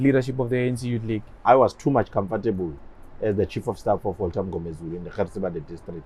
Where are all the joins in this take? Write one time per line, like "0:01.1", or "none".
0:01.4